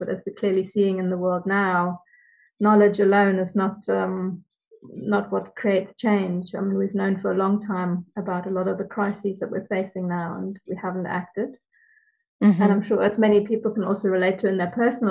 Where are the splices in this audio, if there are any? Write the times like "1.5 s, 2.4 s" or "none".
none

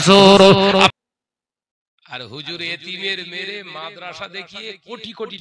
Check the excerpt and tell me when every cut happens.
1.0 s

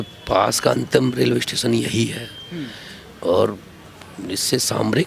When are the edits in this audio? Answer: none

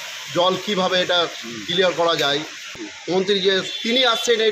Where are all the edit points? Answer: 2.8 s

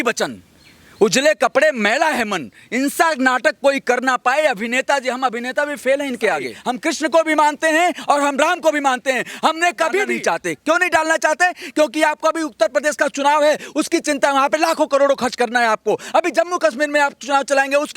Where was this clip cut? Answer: 6.5 s, 10.1 s

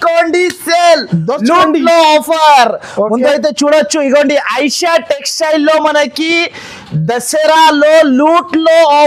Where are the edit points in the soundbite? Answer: none

